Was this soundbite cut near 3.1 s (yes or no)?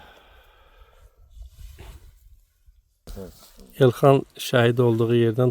yes